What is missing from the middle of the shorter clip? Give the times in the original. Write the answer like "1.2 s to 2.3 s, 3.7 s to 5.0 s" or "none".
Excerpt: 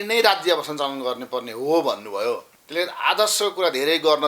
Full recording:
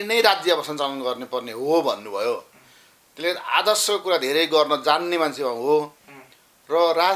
2.5 s to 3.0 s

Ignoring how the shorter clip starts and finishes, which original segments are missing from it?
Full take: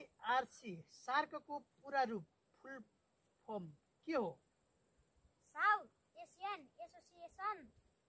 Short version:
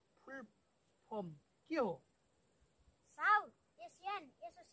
none

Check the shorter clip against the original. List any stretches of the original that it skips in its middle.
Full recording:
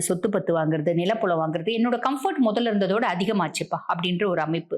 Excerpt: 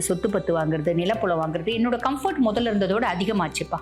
none

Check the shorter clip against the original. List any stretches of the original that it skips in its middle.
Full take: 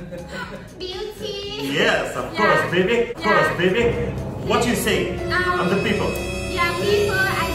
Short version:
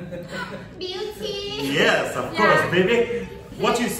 3.1 s to 4.0 s

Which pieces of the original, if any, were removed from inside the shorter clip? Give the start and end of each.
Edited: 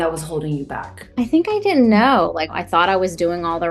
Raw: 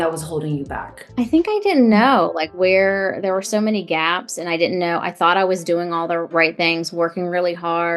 2.5 s to 5.0 s

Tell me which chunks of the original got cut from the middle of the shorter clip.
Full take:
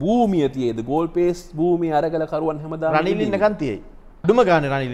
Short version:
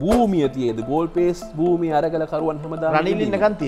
none

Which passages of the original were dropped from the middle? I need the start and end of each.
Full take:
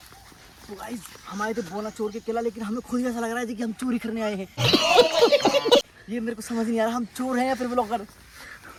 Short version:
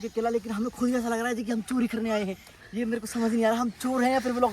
4.6 s to 5.9 s

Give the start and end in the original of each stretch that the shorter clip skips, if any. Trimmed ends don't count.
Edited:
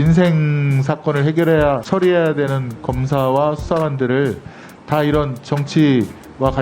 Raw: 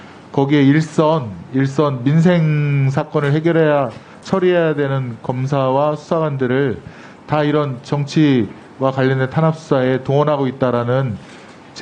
3.9 s to 4.2 s

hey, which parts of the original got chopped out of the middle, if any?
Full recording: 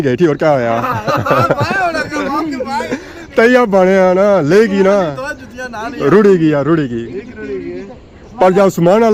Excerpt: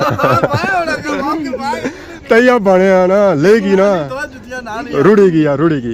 none

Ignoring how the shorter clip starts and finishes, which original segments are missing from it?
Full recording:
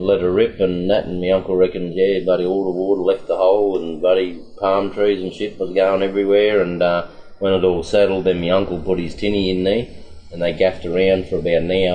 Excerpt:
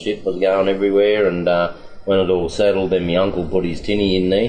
none

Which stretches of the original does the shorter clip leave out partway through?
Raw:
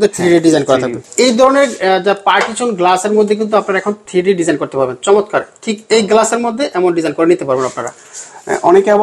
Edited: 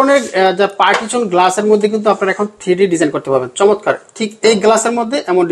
none

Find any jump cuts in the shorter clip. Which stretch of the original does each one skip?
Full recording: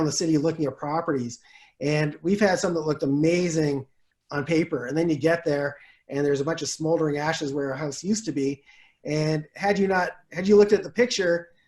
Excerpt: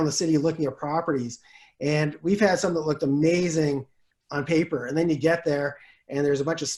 none

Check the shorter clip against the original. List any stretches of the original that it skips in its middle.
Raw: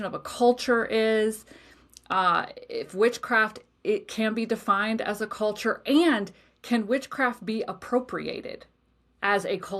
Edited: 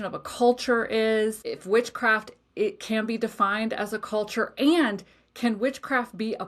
1.4 s to 2.7 s

